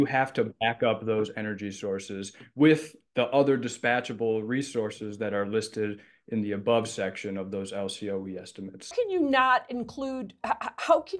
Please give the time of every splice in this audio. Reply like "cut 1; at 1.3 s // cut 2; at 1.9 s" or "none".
cut 1; at 8.8 s